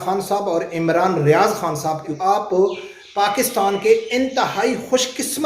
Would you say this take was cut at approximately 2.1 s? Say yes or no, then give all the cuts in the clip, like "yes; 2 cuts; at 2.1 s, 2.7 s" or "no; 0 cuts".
yes; 1 cut; at 2.1 s